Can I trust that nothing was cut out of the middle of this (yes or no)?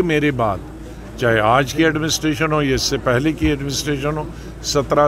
yes